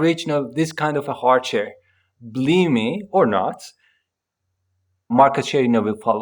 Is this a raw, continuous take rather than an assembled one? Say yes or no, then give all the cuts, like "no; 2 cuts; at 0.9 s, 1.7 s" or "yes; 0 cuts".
no; 1 cut; at 5.1 s